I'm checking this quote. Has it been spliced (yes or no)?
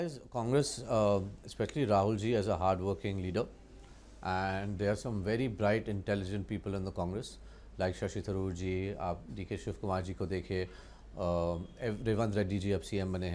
no